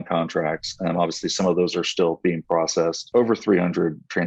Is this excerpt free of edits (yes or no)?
no